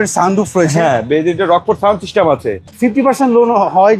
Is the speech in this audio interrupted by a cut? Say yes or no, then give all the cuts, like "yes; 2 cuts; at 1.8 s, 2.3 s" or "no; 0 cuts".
yes; 1 cut; at 2.6 s